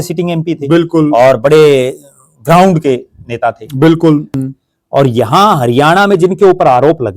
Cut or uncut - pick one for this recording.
cut